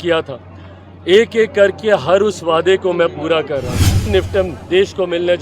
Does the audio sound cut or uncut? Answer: cut